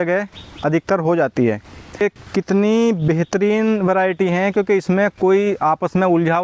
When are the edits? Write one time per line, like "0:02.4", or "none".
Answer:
0:02.0